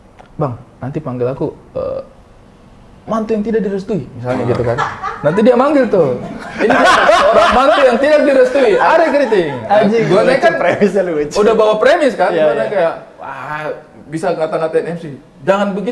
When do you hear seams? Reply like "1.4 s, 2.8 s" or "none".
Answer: none